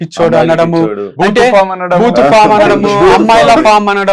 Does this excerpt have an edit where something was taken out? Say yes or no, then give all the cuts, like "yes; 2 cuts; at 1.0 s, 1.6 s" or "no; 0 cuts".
no; 0 cuts